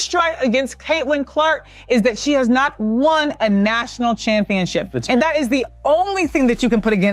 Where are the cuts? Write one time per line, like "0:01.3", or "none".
none